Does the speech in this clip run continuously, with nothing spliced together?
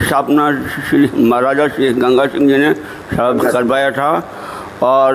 yes; 0 cuts

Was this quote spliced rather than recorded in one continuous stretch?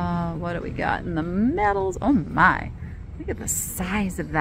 no; 0 cuts

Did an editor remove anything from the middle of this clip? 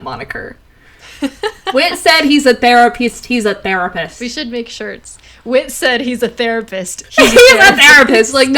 yes; 2 cuts; at 4.1 s, 7.1 s

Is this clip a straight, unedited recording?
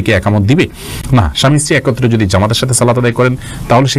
yes; 0 cuts

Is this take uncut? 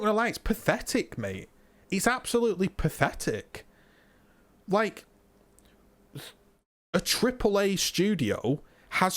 yes; 0 cuts

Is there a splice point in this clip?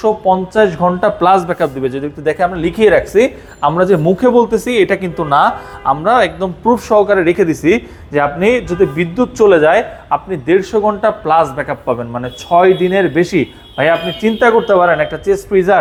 no; 0 cuts

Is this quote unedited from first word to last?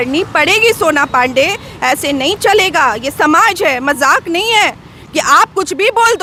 yes; 0 cuts

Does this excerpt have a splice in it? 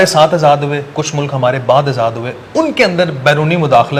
no; 0 cuts

